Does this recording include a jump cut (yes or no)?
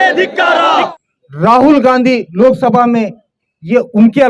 yes